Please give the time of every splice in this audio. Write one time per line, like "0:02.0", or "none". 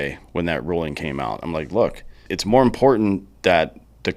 0:02.3